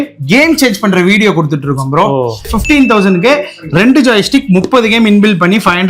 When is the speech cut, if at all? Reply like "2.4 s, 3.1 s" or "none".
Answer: 2.5 s